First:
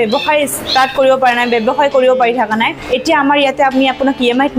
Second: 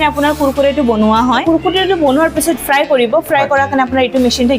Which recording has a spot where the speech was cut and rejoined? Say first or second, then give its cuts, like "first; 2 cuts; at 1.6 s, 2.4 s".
second; 2 cuts; at 1.4 s, 2.6 s